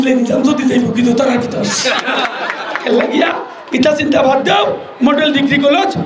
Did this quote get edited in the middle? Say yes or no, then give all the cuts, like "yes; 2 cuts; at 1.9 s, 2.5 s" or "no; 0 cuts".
no; 0 cuts